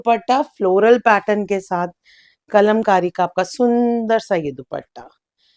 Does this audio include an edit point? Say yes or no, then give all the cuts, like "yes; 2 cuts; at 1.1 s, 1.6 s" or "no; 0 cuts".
no; 0 cuts